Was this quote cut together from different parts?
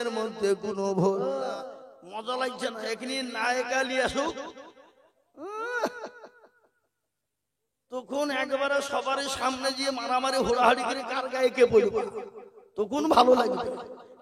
yes; 1 cut; at 1.2 s

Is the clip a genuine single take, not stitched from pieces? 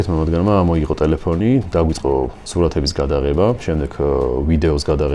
no; 1 cut; at 2.4 s

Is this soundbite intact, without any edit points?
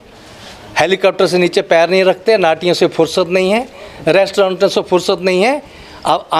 yes; 0 cuts

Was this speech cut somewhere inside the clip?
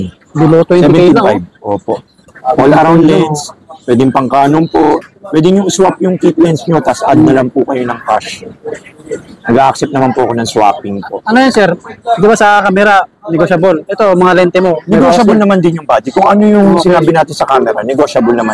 yes; 1 cut; at 2.3 s

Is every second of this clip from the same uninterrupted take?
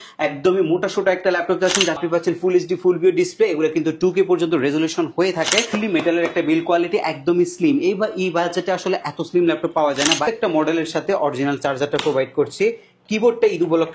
no; 3 cuts; at 2.0 s, 5.8 s, 10.2 s

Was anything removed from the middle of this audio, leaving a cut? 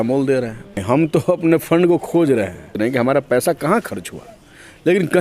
yes; 2 cuts; at 0.8 s, 2.8 s

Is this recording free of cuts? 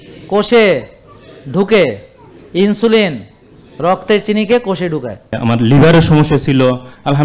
no; 1 cut; at 5.4 s

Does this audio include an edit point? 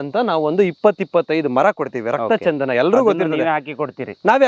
no; 0 cuts

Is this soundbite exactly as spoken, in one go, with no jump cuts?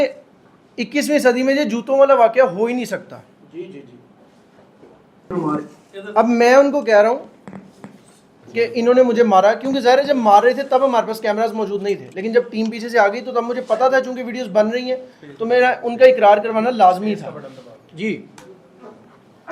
yes; 0 cuts

